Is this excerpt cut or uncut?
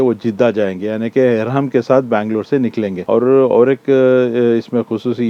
cut